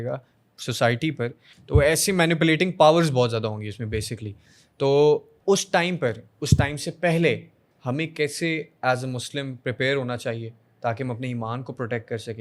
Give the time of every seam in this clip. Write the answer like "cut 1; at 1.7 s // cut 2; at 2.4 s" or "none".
cut 1; at 1.5 s // cut 2; at 5.3 s